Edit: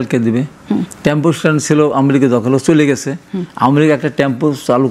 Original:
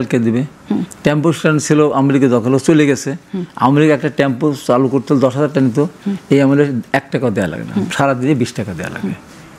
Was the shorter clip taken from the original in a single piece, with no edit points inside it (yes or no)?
yes